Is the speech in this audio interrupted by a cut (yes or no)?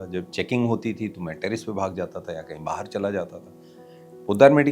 no